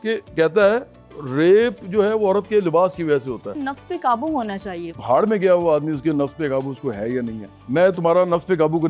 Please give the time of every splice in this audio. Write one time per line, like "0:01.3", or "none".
0:03.5
0:05.0
0:07.5